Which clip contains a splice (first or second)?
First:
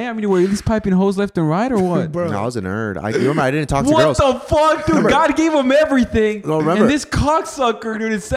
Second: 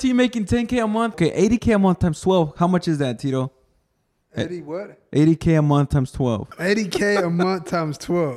second